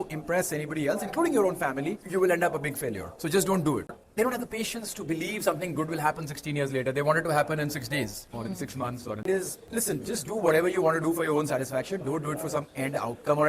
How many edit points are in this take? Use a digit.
2